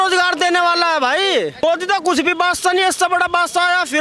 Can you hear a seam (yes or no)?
yes